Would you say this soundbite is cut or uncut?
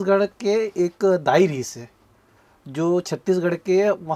uncut